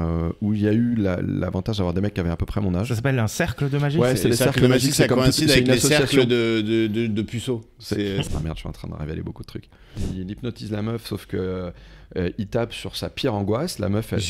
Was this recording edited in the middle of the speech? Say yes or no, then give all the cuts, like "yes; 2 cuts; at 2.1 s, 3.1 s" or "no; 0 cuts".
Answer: yes; 2 cuts; at 8.2 s, 10.1 s